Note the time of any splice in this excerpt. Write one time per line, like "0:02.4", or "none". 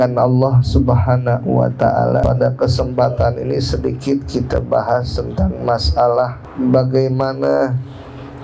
0:02.2
0:06.4